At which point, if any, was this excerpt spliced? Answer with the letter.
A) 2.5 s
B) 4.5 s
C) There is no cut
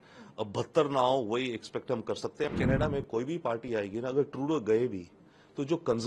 A